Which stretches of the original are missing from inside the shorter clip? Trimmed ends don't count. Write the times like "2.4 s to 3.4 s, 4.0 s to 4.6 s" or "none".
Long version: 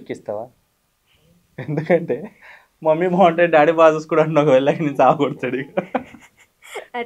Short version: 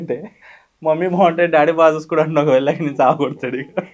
none